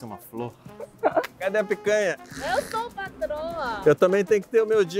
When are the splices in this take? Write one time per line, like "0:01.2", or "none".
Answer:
0:01.3
0:02.3
0:03.8